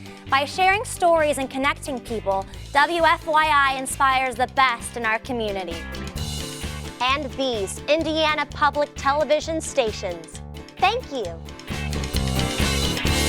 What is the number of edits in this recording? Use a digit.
1